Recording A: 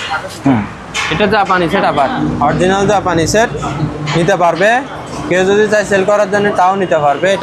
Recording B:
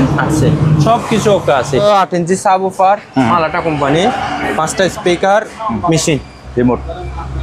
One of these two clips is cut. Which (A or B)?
B